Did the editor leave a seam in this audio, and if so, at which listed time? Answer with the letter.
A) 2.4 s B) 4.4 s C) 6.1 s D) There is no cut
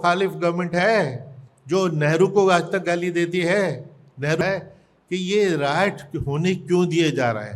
B